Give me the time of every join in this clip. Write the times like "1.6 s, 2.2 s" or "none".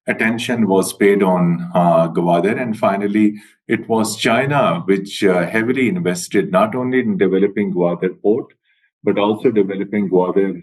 none